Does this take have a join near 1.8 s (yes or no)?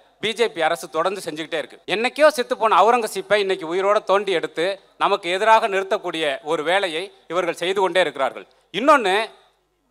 yes